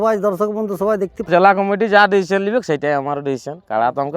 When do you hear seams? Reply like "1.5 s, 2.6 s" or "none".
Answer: 1.3 s